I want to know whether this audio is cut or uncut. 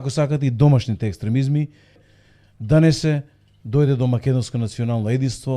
cut